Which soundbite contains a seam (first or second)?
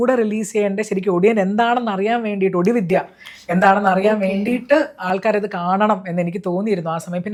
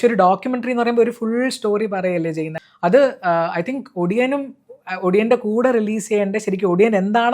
second